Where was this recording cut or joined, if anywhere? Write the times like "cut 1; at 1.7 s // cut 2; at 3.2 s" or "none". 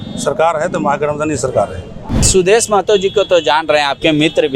cut 1; at 2.2 s